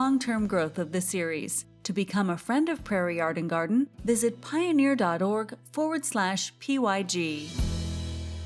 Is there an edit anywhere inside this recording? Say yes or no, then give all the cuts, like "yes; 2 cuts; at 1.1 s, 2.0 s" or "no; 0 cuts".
yes; 1 cut; at 7.5 s